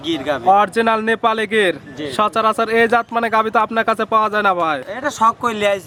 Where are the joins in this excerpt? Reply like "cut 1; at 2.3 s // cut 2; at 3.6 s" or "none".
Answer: none